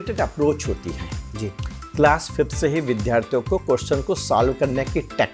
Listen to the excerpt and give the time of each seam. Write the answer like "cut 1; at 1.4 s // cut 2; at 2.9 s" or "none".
none